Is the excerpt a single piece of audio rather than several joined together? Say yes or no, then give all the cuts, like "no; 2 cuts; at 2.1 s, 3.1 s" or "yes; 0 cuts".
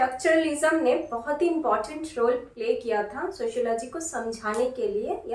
yes; 0 cuts